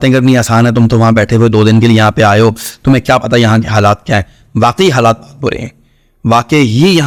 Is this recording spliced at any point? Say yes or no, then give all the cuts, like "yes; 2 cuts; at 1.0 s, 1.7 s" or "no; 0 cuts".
no; 0 cuts